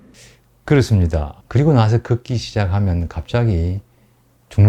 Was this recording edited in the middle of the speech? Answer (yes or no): yes